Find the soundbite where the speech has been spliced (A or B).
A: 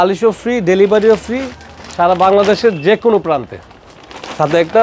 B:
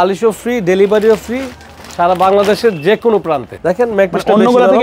B